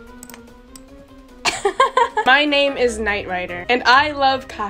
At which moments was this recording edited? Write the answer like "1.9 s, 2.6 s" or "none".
2.2 s